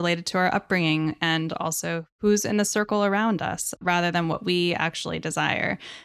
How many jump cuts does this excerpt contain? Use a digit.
2